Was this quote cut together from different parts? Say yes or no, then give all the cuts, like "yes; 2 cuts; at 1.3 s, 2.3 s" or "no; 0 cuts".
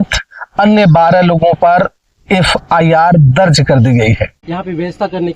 yes; 1 cut; at 4.4 s